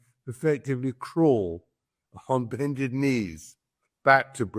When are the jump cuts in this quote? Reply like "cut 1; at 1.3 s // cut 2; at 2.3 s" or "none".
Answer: none